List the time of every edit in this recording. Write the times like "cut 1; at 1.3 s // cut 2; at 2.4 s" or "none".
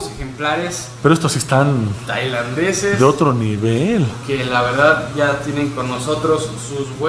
none